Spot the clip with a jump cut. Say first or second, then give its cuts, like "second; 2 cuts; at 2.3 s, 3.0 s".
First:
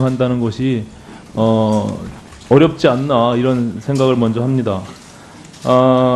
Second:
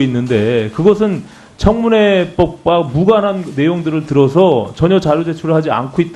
second; 1 cut; at 3.4 s